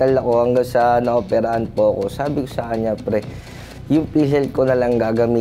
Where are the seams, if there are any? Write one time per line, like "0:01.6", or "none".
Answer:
none